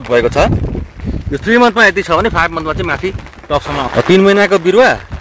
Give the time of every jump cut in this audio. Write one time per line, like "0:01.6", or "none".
0:03.9